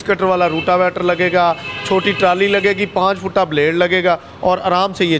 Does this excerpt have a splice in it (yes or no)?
no